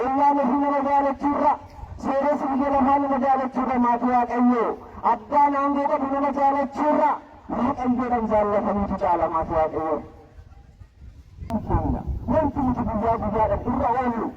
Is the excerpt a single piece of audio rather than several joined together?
no; 1 cut; at 11.5 s

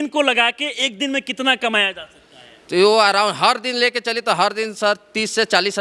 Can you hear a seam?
no; 0 cuts

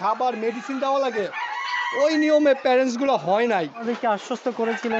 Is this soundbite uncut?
no; 1 cut; at 3.9 s

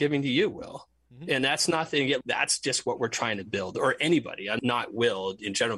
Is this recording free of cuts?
no; 2 cuts; at 2.2 s, 4.6 s

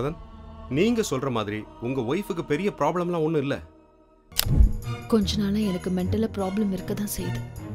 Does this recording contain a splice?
yes; 1 cut; at 4.6 s

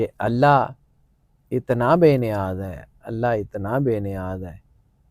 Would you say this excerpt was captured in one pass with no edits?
yes; 0 cuts

